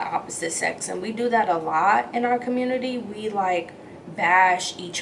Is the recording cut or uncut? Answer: uncut